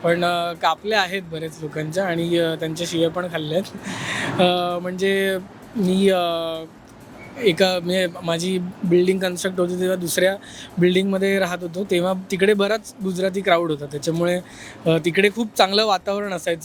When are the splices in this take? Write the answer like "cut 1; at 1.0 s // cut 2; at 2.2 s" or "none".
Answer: none